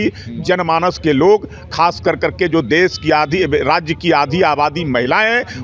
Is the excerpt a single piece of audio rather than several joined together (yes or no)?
yes